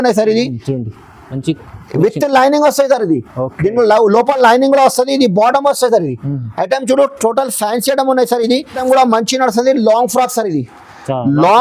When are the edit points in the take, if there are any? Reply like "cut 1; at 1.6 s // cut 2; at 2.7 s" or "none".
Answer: cut 1; at 8.8 s